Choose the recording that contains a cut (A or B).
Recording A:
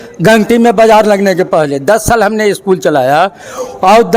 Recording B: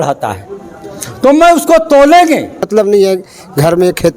B